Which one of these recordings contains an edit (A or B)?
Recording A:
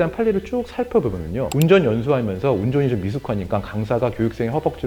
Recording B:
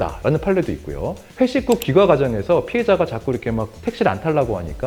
A